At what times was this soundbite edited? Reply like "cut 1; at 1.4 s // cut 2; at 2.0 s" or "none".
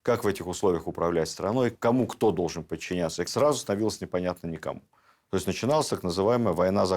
cut 1; at 3.3 s